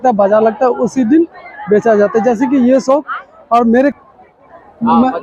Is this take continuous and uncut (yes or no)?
no